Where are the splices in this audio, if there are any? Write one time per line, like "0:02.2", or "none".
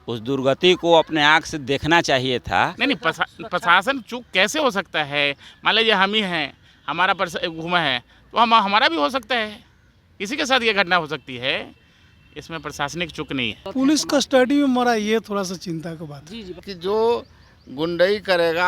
0:02.7
0:13.6
0:16.7